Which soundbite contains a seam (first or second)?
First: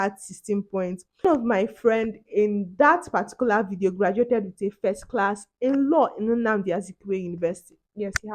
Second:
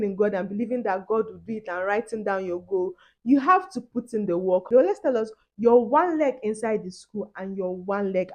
second